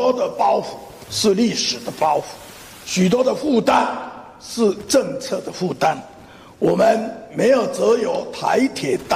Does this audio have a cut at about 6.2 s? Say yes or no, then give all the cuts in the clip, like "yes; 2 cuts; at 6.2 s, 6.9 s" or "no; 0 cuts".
no; 0 cuts